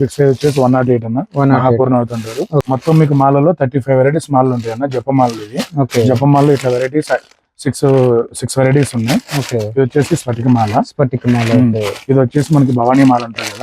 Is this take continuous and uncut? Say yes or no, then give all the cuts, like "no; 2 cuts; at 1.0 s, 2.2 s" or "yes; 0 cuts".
no; 1 cut; at 2.6 s